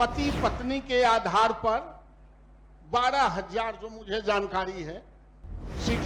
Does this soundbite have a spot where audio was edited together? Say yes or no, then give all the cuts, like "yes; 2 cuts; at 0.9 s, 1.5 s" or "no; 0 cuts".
no; 0 cuts